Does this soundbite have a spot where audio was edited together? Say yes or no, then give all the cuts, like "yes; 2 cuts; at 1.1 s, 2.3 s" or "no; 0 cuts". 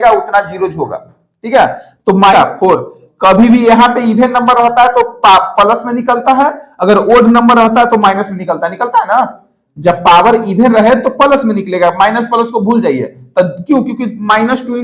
yes; 1 cut; at 2.3 s